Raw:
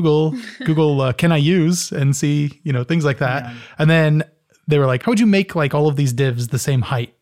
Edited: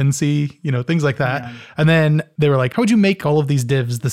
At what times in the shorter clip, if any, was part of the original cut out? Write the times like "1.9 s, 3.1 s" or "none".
2.3 s, 3.2 s